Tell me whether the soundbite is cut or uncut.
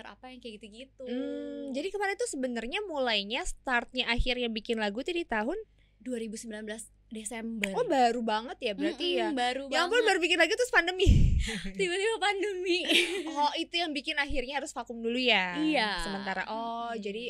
uncut